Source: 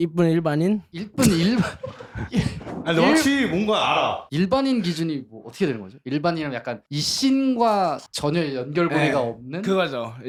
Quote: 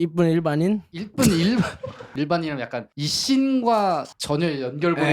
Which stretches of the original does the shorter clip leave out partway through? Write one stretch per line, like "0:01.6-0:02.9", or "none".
0:02.0-0:05.9